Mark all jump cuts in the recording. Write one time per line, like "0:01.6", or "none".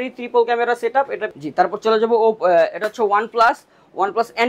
0:01.2